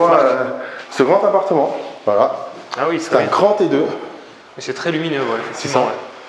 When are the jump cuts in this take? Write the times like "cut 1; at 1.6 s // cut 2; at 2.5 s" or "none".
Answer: none

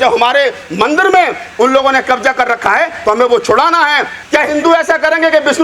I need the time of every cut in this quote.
cut 1; at 4.1 s

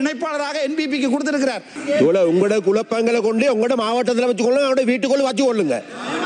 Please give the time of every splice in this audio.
cut 1; at 1.7 s

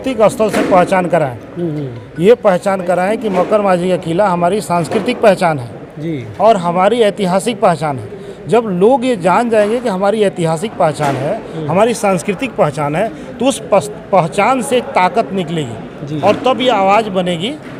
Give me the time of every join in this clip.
none

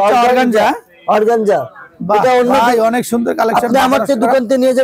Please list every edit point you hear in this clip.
none

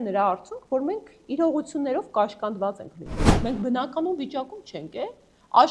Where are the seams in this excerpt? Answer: cut 1; at 3.2 s

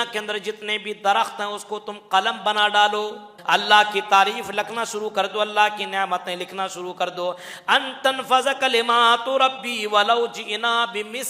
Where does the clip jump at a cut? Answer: cut 1; at 3.3 s

